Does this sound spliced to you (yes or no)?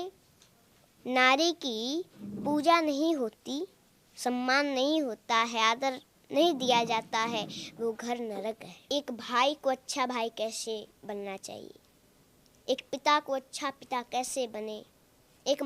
yes